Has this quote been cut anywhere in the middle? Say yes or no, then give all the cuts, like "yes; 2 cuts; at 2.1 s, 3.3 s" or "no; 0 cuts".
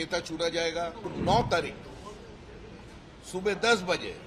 yes; 1 cut; at 1.1 s